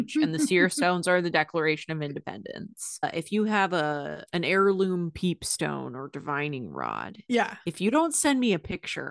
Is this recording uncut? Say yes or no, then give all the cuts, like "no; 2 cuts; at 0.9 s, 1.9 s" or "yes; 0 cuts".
no; 2 cuts; at 3.0 s, 4.2 s